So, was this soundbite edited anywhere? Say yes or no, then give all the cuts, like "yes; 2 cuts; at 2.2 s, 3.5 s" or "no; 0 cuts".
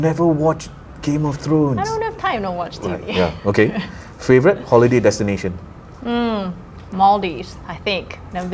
no; 0 cuts